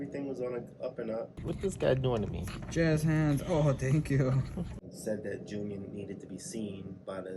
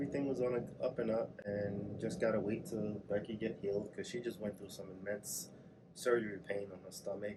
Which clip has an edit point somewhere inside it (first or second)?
first